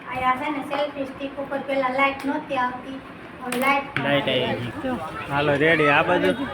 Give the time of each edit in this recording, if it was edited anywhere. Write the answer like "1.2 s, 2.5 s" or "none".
4.6 s